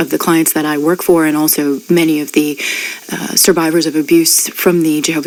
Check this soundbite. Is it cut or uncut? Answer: uncut